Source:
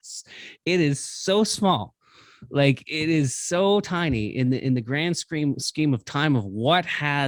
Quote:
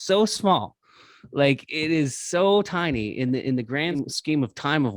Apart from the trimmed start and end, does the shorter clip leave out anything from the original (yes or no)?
yes